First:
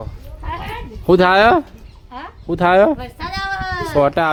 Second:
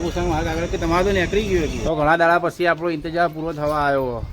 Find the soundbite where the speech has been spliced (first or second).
second